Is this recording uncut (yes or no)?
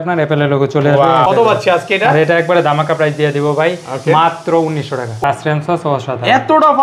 no